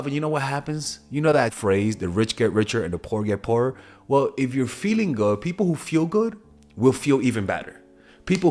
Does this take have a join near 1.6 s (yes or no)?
yes